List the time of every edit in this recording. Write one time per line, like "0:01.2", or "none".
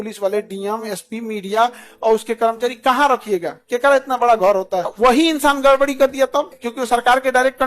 0:04.9
0:06.6